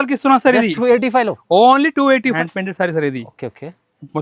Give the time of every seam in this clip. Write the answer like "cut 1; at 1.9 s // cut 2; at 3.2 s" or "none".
cut 1; at 2.4 s